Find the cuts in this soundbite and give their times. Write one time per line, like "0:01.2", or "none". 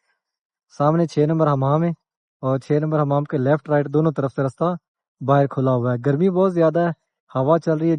none